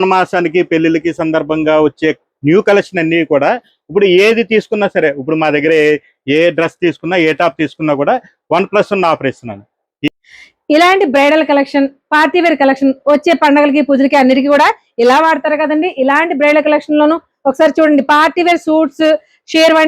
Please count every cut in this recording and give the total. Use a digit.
1